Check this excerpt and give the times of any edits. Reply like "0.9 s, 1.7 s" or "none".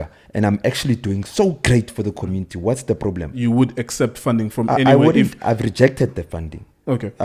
3.3 s